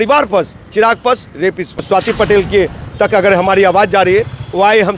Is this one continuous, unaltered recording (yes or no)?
no